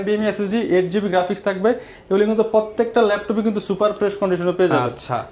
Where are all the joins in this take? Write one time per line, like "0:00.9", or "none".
none